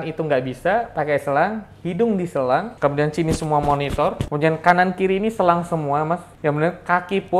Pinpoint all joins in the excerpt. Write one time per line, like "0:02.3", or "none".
0:02.7
0:04.2
0:06.3